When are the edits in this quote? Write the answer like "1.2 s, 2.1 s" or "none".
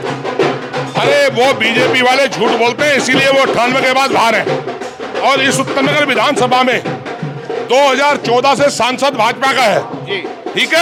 none

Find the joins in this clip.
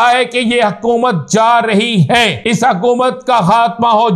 2.4 s

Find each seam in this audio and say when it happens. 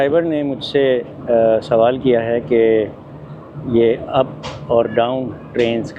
none

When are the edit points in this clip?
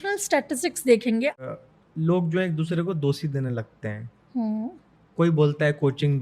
1.4 s

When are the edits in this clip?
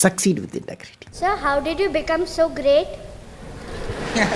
1.1 s

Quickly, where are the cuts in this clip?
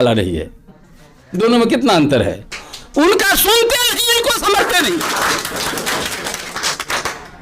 none

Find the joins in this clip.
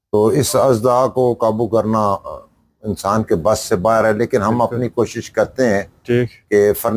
none

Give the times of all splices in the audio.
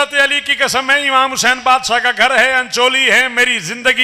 none

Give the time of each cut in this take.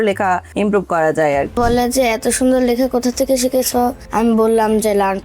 1.6 s, 4.0 s

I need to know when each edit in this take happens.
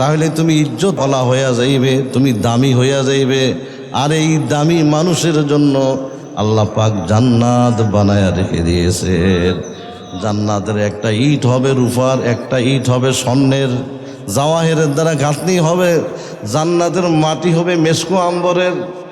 1.0 s

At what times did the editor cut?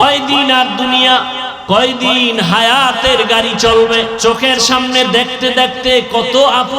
1.5 s, 4.2 s

